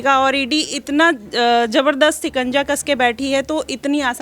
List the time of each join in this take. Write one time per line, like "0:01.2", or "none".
none